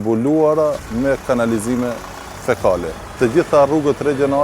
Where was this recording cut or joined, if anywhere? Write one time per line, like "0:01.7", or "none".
0:03.1